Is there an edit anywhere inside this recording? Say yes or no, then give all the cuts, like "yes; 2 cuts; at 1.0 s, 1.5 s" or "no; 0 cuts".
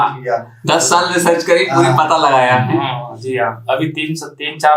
no; 0 cuts